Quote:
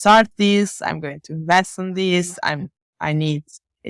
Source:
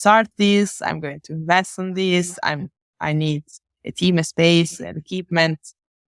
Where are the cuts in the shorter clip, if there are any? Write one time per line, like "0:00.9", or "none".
none